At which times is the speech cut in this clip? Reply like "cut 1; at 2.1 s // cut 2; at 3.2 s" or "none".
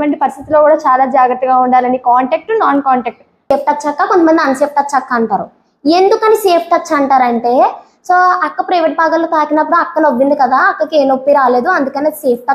cut 1; at 3.5 s